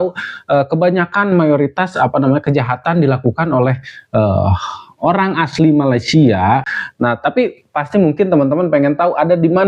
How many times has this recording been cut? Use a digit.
1